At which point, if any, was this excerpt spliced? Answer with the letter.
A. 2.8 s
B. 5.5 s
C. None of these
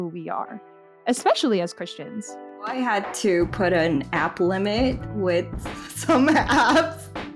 A